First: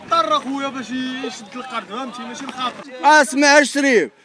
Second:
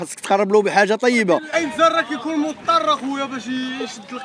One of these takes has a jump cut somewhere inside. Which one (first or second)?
first